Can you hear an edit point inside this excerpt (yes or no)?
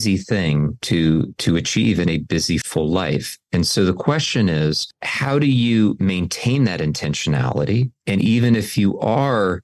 no